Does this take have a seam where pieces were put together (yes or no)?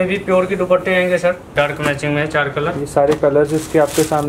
yes